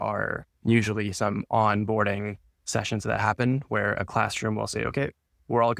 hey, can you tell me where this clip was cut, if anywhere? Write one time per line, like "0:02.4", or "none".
none